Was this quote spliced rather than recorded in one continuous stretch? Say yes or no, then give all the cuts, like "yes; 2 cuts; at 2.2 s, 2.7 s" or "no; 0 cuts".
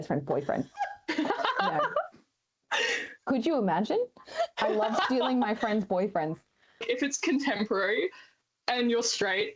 yes; 1 cut; at 6.8 s